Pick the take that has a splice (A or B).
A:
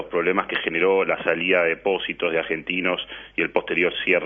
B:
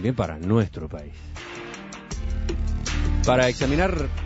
B